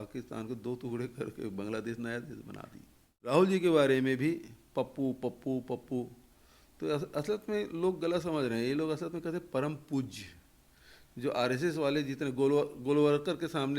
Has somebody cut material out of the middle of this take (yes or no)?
yes